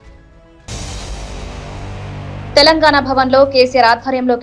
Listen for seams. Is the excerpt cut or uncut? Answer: cut